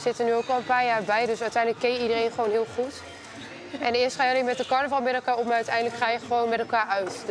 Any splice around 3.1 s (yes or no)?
no